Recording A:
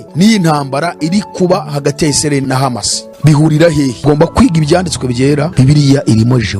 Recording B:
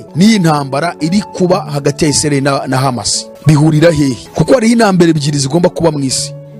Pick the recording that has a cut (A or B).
A